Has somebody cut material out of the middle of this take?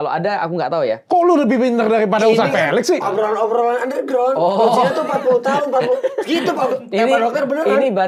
no; 0 cuts

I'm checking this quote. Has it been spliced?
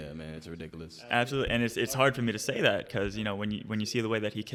no; 0 cuts

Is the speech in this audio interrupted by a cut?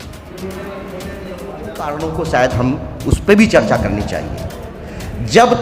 yes; 1 cut; at 1.9 s

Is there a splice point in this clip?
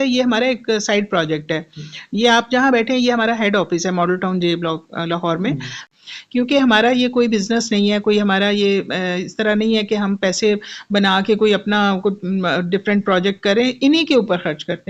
yes; 1 cut; at 5.8 s

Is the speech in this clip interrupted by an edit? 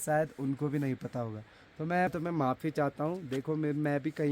yes; 1 cut; at 2.1 s

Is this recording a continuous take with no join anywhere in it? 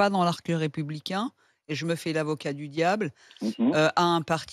yes; 0 cuts

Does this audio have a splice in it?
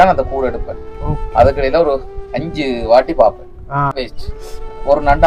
yes; 1 cut; at 3.9 s

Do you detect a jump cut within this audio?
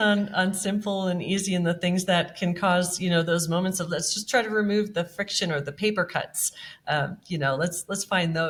no; 0 cuts

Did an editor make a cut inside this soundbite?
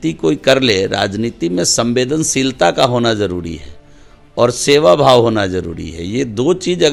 no; 0 cuts

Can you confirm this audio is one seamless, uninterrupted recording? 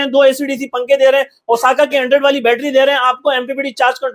yes; 0 cuts

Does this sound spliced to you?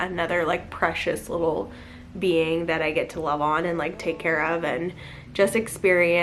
no; 0 cuts

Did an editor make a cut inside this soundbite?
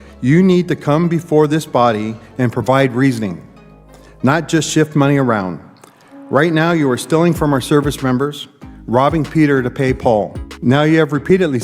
yes; 1 cut; at 10.4 s

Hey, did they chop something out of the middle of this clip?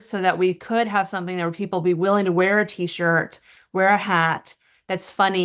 no; 0 cuts

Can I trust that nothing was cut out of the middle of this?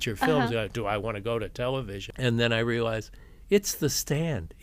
no; 1 cut; at 2.0 s

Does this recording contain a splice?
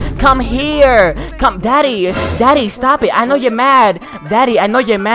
no; 0 cuts

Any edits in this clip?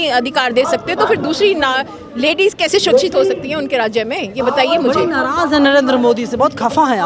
no; 0 cuts

